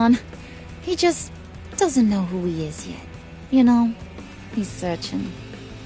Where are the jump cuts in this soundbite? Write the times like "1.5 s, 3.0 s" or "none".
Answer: none